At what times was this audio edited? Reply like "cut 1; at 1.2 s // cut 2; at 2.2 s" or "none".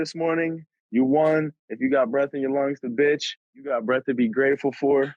none